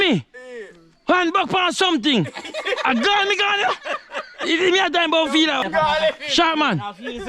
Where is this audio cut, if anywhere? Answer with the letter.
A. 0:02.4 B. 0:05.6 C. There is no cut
B